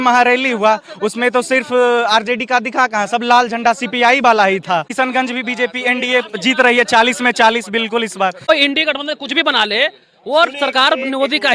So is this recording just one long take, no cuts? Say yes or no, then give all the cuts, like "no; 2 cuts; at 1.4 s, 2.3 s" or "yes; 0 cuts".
no; 2 cuts; at 4.9 s, 8.5 s